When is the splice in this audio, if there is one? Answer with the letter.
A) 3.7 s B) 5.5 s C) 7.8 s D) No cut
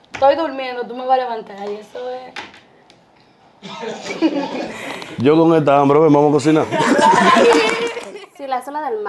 C